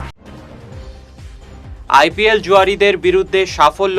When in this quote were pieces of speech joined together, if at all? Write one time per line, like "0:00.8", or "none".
0:01.4